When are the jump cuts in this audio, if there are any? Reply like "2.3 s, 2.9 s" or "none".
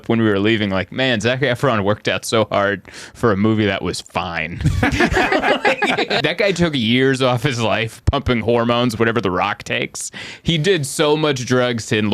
6.2 s